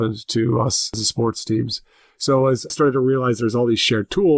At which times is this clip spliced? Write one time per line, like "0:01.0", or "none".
0:00.9
0:02.7